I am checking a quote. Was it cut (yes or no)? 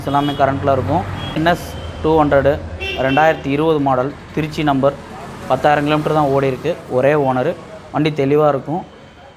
yes